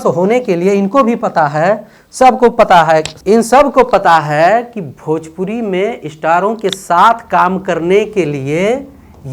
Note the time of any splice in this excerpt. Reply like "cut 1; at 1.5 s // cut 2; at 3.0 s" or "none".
none